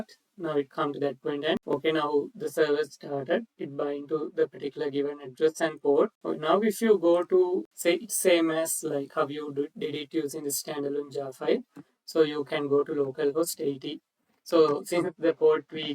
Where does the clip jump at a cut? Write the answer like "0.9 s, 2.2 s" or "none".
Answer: 1.7 s, 6.2 s, 7.7 s